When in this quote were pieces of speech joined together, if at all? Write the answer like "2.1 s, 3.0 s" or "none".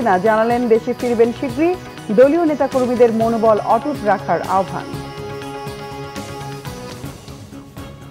6.9 s